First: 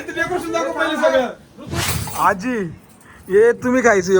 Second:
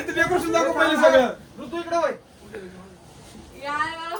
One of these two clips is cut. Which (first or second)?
first